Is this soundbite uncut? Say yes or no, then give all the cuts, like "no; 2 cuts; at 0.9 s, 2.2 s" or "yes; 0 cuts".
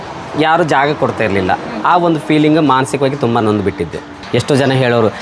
no; 1 cut; at 4.2 s